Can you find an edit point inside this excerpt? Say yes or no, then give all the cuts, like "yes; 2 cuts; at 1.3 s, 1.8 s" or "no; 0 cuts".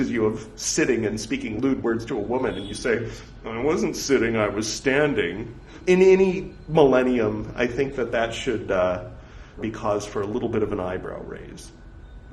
yes; 3 cuts; at 1.5 s, 5.8 s, 9.6 s